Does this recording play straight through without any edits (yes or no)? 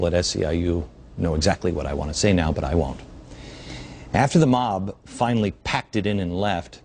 yes